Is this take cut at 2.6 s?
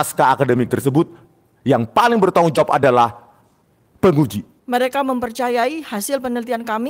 no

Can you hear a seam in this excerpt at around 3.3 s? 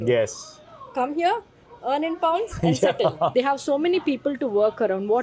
yes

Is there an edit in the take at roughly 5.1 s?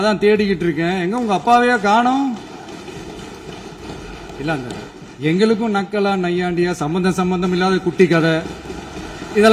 no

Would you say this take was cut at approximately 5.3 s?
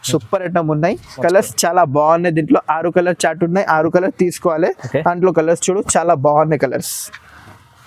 no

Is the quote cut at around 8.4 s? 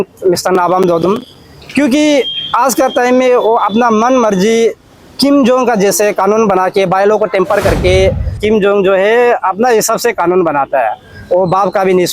yes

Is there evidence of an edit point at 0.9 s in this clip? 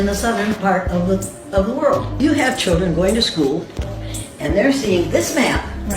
no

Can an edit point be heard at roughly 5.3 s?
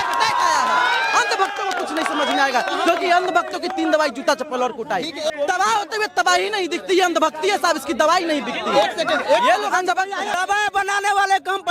yes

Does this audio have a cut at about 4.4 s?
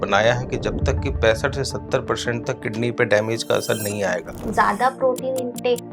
yes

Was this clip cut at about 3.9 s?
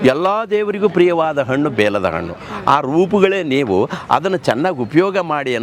no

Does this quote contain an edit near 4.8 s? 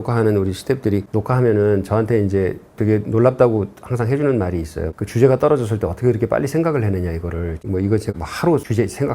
yes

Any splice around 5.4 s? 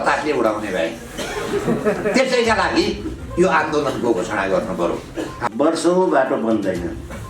yes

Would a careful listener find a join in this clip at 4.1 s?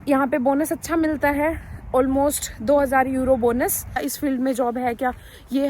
yes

